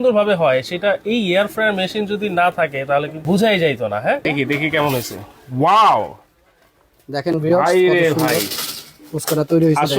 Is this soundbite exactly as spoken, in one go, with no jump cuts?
no; 2 cuts; at 3.1 s, 4.2 s

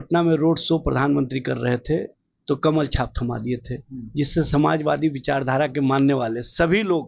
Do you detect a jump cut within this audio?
no; 0 cuts

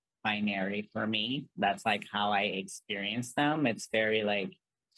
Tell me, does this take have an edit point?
no; 0 cuts

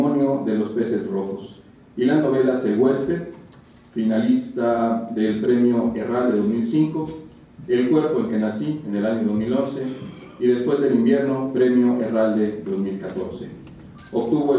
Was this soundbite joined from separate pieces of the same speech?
yes; 1 cut; at 13.6 s

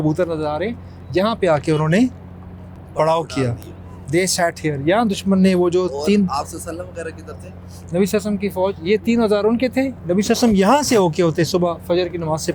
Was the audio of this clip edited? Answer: no; 0 cuts

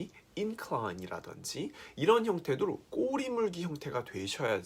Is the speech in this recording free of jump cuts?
yes; 0 cuts

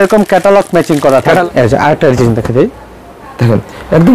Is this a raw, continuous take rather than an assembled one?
no; 1 cut; at 1.4 s

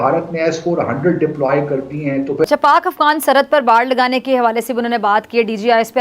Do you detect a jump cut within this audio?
yes; 1 cut; at 2.5 s

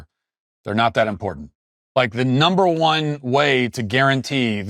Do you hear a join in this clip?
yes; 1 cut; at 1.9 s

